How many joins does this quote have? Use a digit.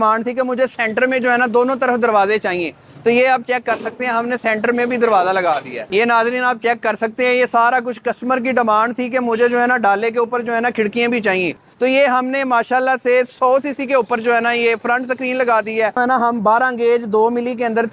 3